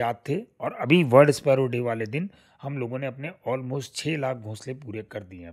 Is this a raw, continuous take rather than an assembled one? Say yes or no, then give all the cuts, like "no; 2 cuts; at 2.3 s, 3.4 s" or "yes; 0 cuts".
yes; 0 cuts